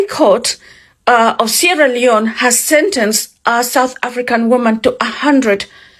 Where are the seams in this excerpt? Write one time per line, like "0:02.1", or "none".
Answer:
none